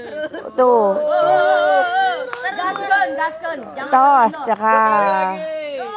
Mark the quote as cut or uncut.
uncut